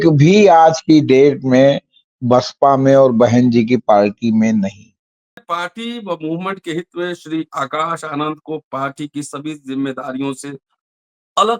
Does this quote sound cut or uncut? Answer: cut